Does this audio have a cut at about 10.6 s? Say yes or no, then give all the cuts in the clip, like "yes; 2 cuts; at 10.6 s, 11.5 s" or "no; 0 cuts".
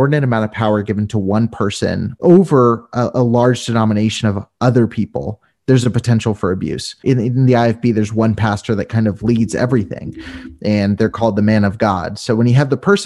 no; 2 cuts; at 2.1 s, 7.0 s